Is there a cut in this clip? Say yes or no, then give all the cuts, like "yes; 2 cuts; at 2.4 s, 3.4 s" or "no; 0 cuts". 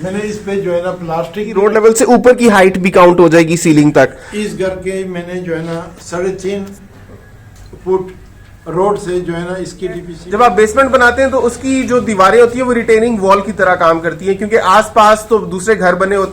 yes; 2 cuts; at 1.6 s, 10.1 s